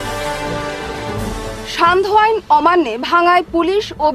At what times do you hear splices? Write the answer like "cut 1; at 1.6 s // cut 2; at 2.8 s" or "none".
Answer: cut 1; at 1.3 s